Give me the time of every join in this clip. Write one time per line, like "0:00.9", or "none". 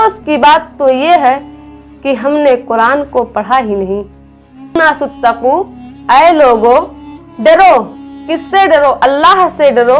0:04.8